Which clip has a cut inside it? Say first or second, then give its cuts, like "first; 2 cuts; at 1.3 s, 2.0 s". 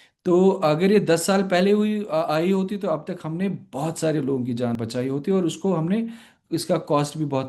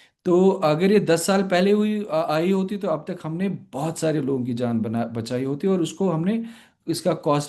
first; 1 cut; at 4.7 s